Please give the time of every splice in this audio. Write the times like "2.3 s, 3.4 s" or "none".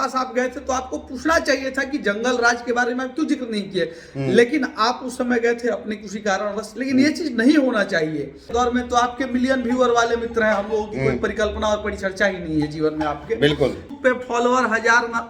8.5 s, 13.9 s